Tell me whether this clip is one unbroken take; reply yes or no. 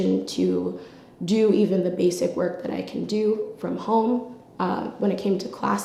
yes